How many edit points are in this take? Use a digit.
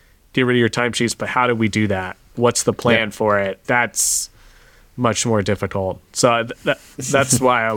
2